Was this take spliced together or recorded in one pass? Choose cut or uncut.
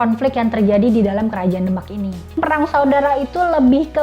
cut